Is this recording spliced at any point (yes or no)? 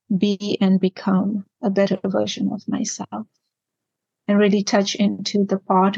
yes